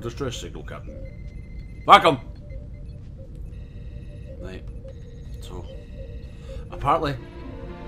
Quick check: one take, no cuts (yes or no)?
yes